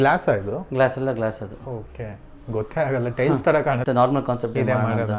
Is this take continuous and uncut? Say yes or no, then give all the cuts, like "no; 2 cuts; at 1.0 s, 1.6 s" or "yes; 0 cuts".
no; 1 cut; at 3.8 s